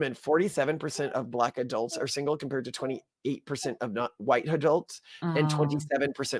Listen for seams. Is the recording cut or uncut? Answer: uncut